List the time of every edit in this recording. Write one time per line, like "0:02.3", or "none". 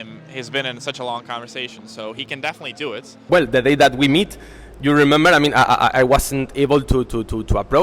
0:03.3